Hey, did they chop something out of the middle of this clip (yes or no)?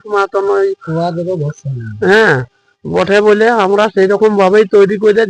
no